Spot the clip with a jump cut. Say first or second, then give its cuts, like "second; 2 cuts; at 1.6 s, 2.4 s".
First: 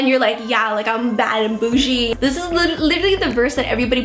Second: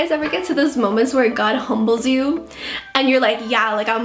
first; 1 cut; at 2.1 s